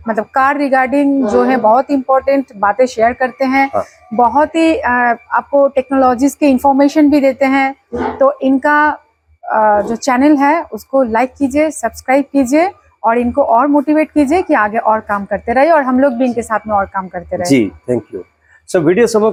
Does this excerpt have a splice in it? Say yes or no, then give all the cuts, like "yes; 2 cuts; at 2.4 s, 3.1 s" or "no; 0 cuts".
no; 0 cuts